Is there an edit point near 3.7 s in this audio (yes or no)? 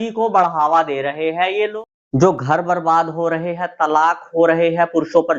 no